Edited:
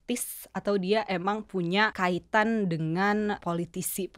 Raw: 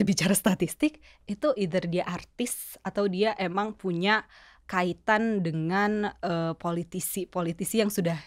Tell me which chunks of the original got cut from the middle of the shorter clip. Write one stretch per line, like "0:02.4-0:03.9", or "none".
0:04.2-0:04.7
0:06.1-0:06.6